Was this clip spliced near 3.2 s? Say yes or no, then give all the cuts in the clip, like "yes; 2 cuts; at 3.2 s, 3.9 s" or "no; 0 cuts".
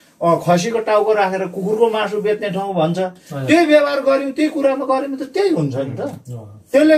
no; 0 cuts